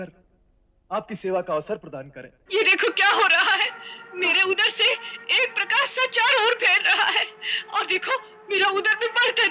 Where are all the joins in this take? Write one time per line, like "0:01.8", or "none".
0:02.4